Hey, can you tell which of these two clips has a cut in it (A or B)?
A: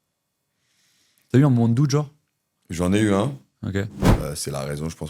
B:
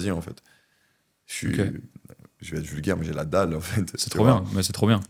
A